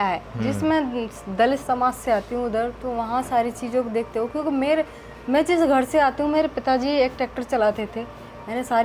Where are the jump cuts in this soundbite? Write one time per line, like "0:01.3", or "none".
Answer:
none